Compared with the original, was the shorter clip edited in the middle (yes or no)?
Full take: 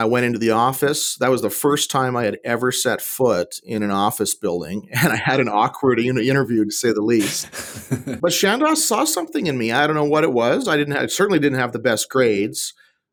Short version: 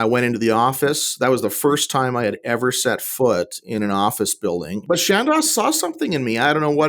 yes